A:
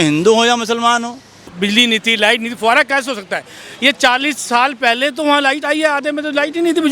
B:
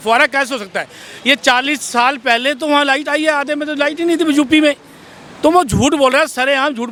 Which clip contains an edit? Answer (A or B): A